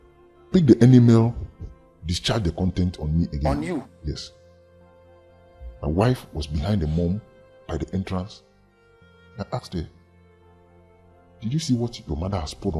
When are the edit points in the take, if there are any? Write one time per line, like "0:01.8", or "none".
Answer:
0:04.2
0:05.8

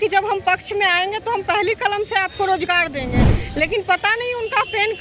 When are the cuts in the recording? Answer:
none

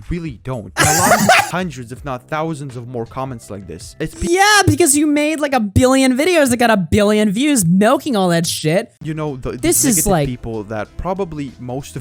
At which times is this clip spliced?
0:01.5
0:09.0

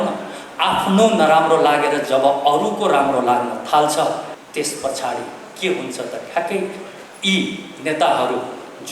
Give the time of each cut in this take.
0:04.4

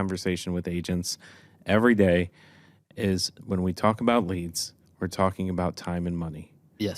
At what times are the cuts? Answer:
none

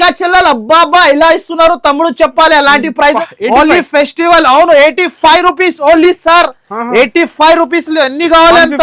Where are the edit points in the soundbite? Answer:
0:03.2

